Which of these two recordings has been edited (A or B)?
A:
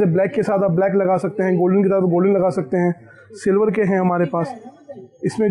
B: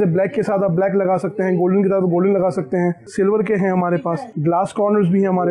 B